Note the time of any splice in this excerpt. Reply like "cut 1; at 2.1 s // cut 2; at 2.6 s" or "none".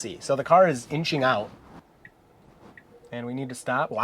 cut 1; at 1.7 s